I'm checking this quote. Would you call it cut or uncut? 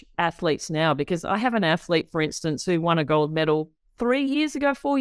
uncut